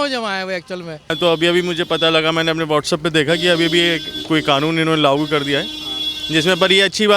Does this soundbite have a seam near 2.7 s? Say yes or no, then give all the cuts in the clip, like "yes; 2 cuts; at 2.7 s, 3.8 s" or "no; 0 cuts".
no; 1 cut; at 1.0 s